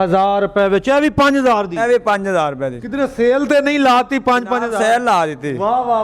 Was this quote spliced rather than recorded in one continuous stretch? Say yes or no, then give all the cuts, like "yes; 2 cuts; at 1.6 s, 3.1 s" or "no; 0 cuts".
no; 0 cuts